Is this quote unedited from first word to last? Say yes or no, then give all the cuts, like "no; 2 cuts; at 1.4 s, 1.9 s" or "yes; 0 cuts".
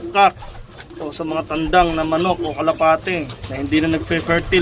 no; 1 cut; at 3.4 s